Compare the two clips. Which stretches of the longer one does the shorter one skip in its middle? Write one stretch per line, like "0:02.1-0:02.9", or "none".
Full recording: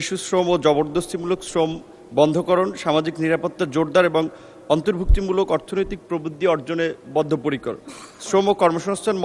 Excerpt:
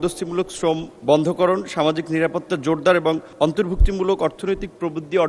0:01.8-0:02.0
0:04.4-0:04.6